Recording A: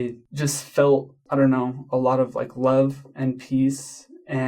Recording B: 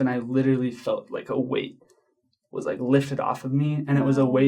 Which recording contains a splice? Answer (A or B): A